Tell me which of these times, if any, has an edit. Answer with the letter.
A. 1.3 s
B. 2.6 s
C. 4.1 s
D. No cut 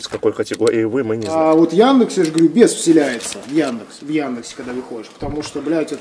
A